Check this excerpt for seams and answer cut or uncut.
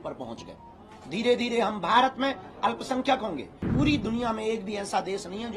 cut